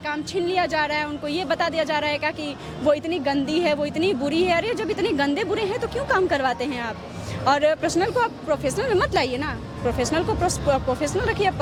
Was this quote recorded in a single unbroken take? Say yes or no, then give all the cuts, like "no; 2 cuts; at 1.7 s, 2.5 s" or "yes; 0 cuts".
yes; 0 cuts